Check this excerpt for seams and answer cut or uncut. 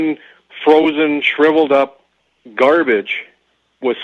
uncut